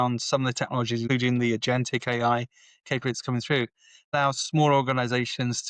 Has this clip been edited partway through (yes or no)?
yes